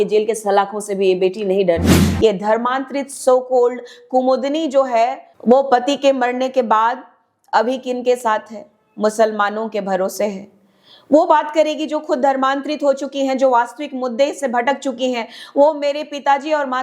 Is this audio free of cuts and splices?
no; 2 cuts; at 2.0 s, 5.3 s

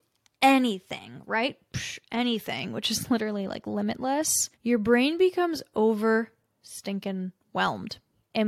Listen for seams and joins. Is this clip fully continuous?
yes; 0 cuts

